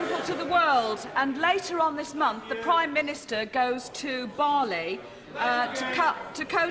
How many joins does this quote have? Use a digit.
1